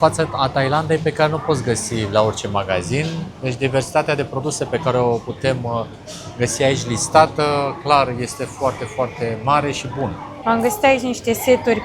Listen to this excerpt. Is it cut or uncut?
uncut